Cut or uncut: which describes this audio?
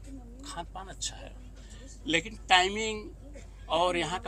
uncut